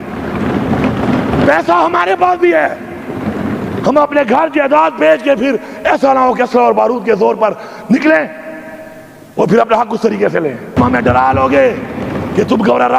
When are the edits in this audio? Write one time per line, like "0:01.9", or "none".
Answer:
0:10.8